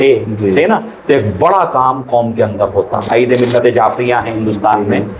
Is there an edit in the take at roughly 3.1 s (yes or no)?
yes